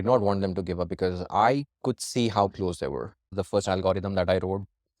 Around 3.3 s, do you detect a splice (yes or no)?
yes